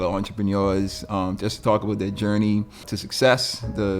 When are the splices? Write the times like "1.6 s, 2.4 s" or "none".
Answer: 3.0 s